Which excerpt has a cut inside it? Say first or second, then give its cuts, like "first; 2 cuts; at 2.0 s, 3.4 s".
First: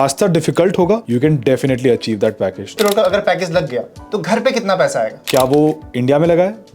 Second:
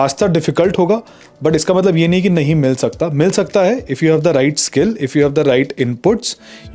first; 3 cuts; at 1.0 s, 2.7 s, 5.2 s